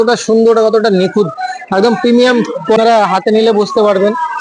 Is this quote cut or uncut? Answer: cut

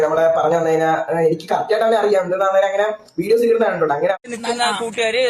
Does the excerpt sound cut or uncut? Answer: cut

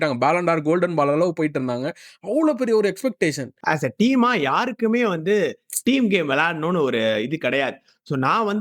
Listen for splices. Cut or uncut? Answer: cut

